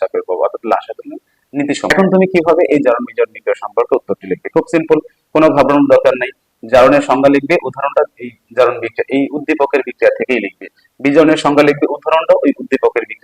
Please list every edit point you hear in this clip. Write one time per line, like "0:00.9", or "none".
0:01.9